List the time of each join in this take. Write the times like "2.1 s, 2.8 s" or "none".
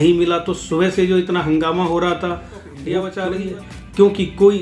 3.1 s